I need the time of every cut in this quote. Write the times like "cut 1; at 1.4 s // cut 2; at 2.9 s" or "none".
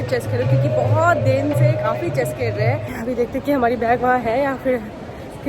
cut 1; at 2.9 s